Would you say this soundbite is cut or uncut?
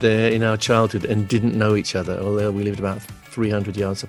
uncut